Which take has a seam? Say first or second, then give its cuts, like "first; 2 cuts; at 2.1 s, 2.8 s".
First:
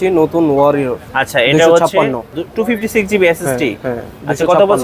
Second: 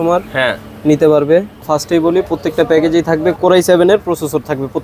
second; 1 cut; at 1.6 s